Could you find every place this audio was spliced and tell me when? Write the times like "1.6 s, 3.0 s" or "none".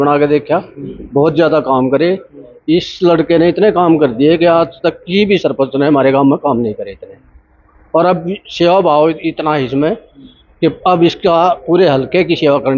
none